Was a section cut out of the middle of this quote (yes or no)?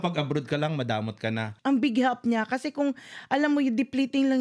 yes